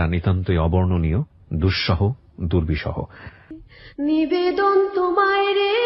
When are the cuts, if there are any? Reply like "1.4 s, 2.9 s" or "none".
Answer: 3.4 s